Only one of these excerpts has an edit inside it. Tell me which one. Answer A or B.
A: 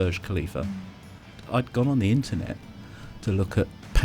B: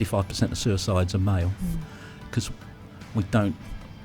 A